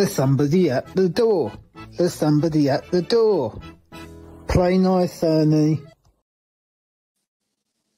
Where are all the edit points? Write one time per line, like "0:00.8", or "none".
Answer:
none